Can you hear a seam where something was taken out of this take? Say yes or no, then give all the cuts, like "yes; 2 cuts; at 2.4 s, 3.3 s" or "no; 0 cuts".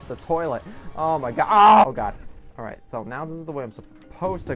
yes; 1 cut; at 1.8 s